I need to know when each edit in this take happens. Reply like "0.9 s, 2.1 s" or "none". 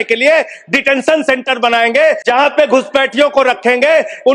2.2 s